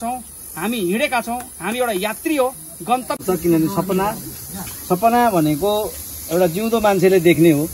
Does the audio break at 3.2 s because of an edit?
yes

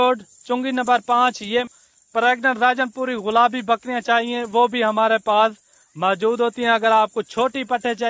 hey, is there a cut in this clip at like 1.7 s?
yes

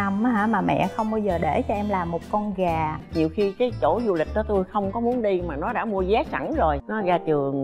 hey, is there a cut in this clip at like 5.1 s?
no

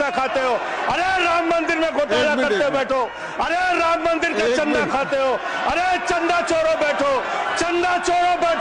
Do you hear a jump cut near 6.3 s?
no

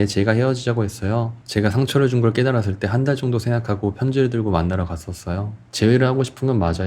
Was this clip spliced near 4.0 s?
no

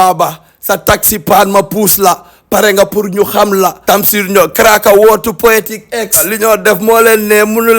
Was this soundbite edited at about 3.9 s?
yes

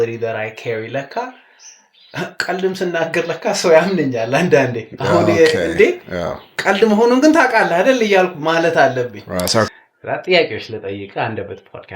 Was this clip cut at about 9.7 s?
yes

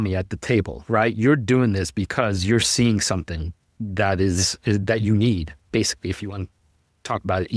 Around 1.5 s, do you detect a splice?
no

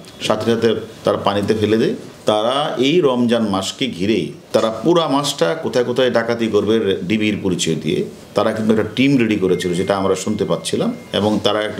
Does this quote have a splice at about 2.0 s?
no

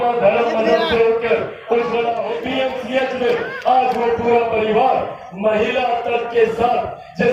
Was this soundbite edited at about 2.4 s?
yes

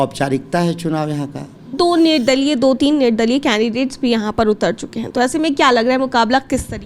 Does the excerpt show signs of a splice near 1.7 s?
yes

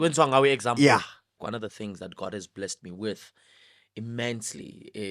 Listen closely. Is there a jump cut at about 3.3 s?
no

